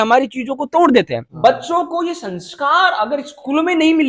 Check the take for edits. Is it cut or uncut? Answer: cut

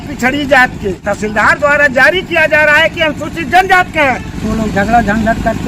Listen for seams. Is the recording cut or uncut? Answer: cut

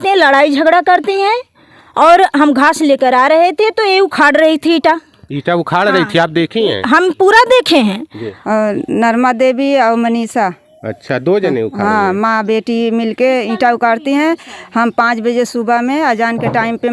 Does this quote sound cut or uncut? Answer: cut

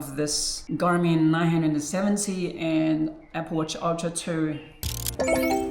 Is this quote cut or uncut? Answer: cut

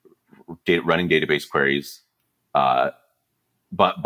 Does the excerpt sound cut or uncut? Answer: uncut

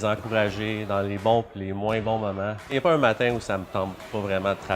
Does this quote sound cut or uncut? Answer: cut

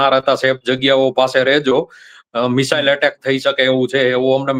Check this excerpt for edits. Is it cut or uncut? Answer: uncut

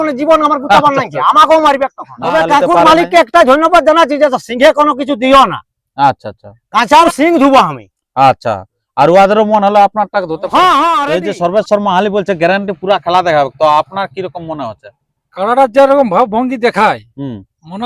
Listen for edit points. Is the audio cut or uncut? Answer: cut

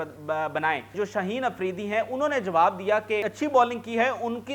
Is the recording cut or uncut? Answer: cut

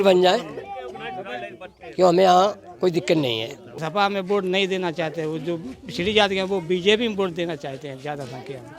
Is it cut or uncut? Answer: cut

